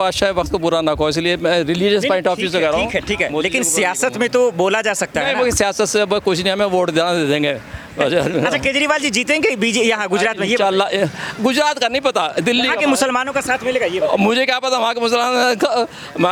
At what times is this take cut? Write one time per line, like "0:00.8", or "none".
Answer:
none